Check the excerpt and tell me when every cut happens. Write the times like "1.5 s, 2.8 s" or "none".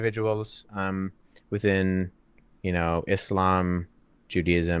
none